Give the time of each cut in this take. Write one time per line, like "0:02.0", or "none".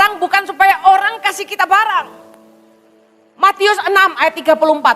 none